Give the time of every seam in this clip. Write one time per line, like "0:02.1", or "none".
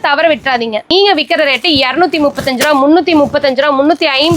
0:00.9